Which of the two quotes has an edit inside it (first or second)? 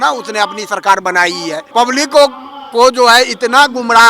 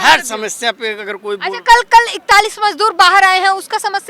first